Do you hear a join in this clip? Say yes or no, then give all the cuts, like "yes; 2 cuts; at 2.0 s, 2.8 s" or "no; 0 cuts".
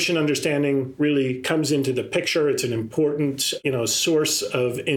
yes; 1 cut; at 3.6 s